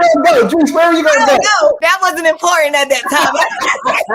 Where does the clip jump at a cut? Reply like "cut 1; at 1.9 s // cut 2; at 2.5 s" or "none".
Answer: none